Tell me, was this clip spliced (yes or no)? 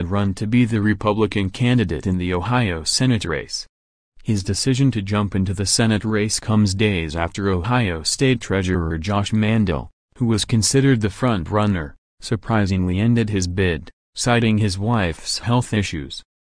no